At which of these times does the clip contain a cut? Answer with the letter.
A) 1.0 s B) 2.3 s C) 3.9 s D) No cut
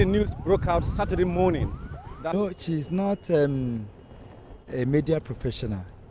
D